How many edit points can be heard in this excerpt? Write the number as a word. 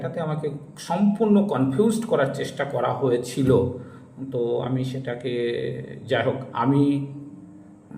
zero